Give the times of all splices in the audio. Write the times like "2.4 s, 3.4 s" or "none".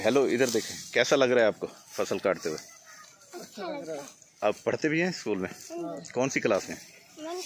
none